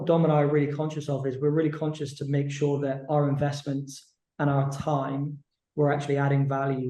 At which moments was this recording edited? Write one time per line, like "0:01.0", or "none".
none